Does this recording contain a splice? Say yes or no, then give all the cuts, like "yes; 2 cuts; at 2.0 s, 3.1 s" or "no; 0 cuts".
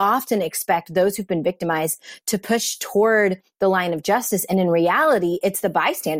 no; 0 cuts